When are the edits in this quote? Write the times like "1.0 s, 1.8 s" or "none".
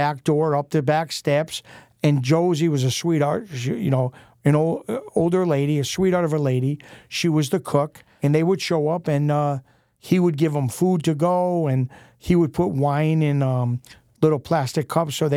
8.0 s